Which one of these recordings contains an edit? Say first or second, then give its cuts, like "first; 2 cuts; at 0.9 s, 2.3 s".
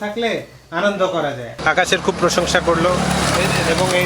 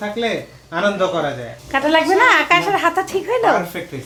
first; 1 cut; at 1.5 s